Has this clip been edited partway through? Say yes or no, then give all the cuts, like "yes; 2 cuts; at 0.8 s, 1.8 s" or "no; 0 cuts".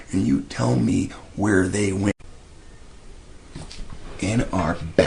no; 0 cuts